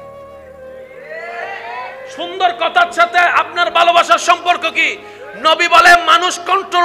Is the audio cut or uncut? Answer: uncut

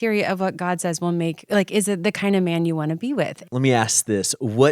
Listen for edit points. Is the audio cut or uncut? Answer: cut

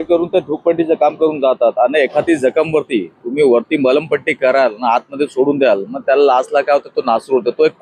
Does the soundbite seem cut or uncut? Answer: uncut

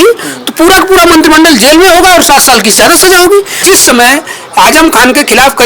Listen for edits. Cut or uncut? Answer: cut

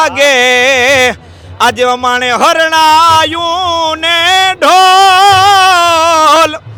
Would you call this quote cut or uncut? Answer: uncut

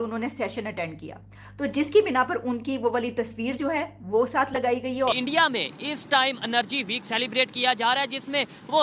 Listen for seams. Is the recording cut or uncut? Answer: cut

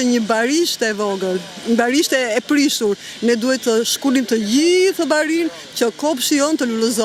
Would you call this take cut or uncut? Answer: uncut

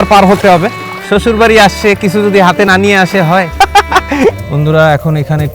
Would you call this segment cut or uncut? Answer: cut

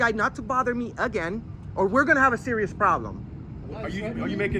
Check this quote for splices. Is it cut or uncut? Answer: uncut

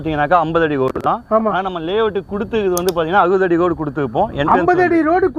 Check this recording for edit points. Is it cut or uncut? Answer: uncut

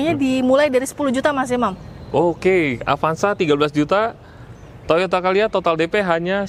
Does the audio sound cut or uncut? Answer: uncut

